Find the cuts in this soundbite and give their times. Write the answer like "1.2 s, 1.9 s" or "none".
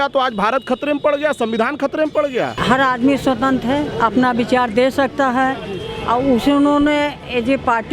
2.6 s